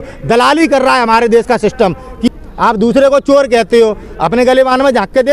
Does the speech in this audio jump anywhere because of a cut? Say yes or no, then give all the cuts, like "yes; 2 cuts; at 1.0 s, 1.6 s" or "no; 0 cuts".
yes; 1 cut; at 2.3 s